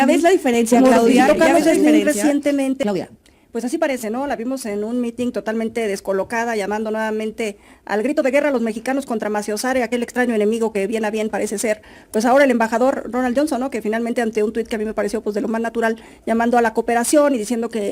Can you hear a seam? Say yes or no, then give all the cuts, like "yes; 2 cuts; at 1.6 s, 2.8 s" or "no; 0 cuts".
yes; 1 cut; at 2.8 s